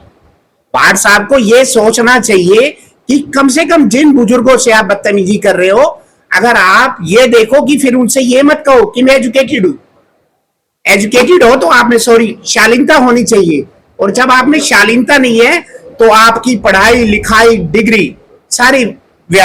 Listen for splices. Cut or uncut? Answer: uncut